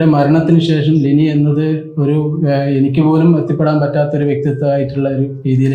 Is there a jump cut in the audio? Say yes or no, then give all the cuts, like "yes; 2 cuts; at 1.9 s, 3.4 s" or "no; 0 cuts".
no; 0 cuts